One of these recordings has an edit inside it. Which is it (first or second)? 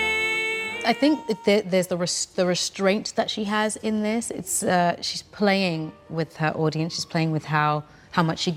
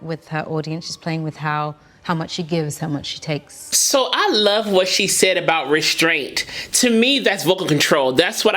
second